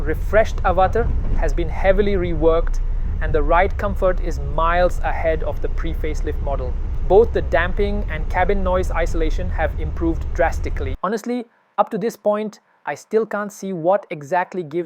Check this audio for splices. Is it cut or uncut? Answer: cut